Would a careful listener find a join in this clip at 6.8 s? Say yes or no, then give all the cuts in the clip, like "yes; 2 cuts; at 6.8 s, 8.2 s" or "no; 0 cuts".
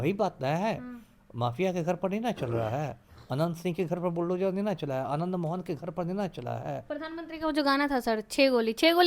yes; 1 cut; at 6.8 s